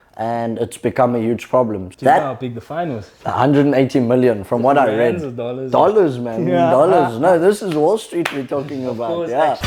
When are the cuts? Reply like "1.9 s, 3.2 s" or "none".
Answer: 1.8 s, 3.2 s